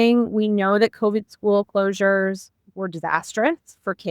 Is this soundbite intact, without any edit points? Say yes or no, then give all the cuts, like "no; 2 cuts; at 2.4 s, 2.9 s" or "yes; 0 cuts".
yes; 0 cuts